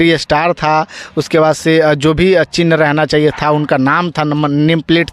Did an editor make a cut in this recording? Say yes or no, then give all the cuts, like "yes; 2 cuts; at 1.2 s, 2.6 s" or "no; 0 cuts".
no; 0 cuts